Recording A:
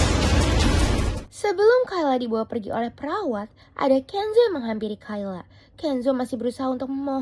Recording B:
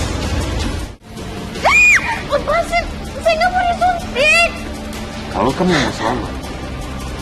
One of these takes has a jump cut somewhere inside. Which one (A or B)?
B